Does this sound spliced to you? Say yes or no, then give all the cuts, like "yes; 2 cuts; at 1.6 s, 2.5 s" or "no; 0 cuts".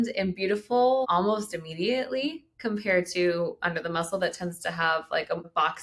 no; 0 cuts